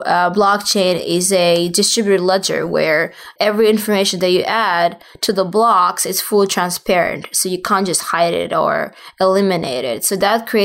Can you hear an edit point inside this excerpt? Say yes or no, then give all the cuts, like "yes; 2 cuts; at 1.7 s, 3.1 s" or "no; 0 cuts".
yes; 1 cut; at 3.3 s